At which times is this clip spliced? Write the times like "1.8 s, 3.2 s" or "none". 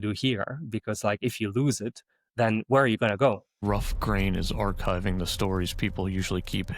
3.5 s

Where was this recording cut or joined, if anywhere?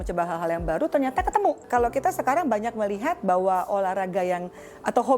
1.6 s

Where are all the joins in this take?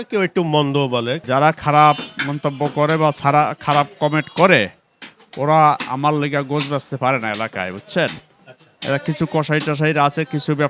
none

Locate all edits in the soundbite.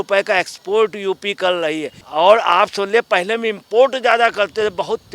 2.0 s

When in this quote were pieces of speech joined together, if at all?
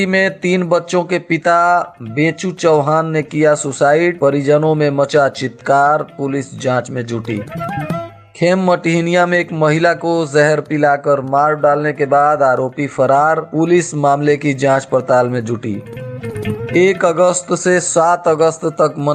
none

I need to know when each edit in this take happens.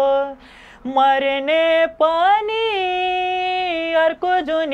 none

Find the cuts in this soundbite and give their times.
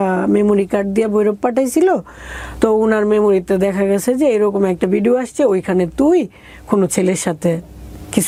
none

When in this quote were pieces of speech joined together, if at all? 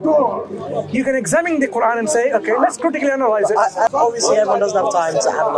3.9 s

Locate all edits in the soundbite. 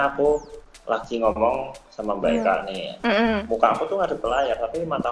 none

